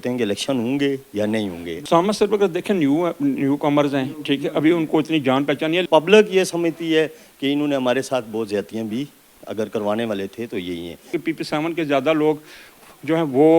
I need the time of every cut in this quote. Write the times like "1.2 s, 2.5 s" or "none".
1.8 s, 5.8 s, 11.1 s

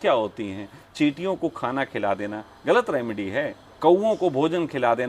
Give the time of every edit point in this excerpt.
3.6 s

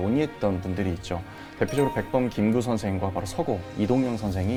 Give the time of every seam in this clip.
none

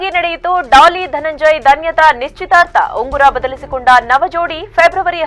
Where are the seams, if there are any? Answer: none

